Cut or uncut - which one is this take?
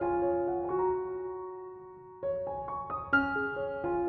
uncut